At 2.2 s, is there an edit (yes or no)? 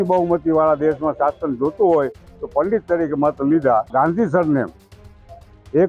no